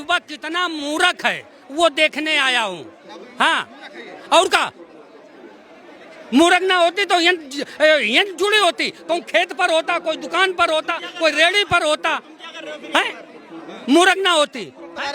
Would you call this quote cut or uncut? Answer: uncut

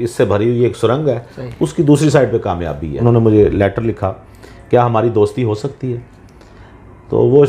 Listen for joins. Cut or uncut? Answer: cut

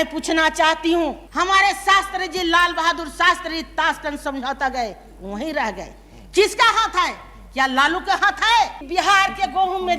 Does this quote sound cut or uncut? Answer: cut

